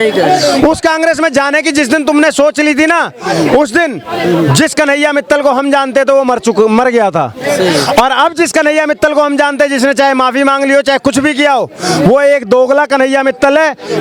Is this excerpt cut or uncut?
uncut